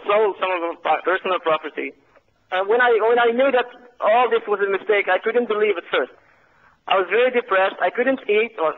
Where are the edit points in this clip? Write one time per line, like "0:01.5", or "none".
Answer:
none